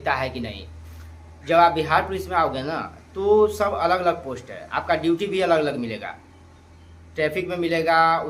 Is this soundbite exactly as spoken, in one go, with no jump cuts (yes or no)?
yes